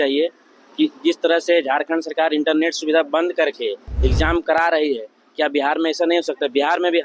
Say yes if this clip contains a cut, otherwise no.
no